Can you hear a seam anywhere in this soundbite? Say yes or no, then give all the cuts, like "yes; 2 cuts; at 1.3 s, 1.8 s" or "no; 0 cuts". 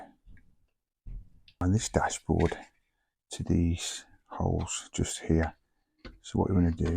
yes; 1 cut; at 1.6 s